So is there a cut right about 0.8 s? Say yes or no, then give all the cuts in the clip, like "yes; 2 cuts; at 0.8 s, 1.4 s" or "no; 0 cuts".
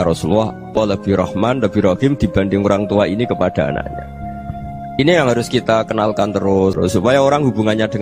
yes; 2 cuts; at 0.8 s, 6.8 s